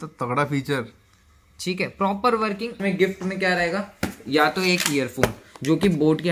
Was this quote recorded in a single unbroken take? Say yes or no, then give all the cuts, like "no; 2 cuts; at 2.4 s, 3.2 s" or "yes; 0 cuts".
no; 1 cut; at 2.8 s